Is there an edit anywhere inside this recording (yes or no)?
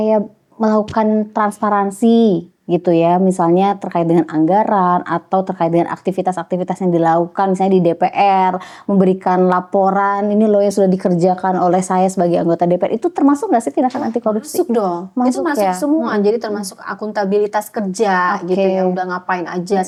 no